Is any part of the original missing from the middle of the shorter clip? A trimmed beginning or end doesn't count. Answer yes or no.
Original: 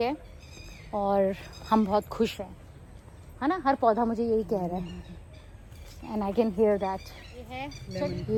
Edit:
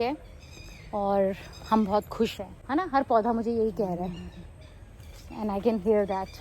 yes